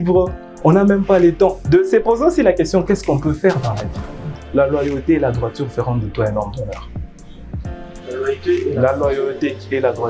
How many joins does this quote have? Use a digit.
1